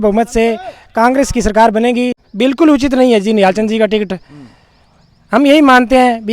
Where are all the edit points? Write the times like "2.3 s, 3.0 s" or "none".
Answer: 2.2 s